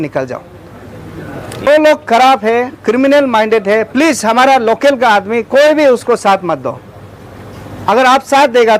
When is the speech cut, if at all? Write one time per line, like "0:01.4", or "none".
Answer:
0:01.7